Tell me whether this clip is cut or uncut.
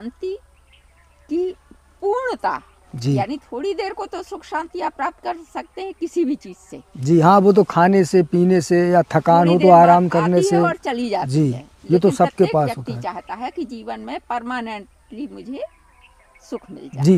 uncut